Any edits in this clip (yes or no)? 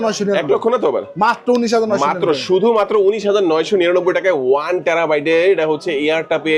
no